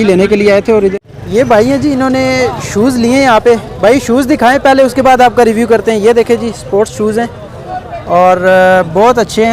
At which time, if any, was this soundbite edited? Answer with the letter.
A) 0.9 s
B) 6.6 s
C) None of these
A